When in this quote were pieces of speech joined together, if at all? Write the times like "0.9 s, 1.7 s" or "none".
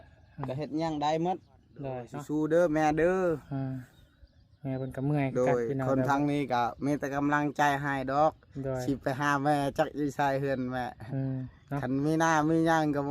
2.1 s